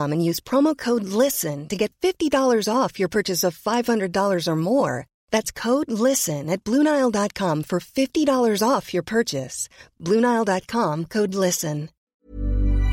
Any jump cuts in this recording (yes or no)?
yes